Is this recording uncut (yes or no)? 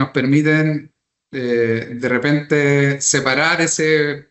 yes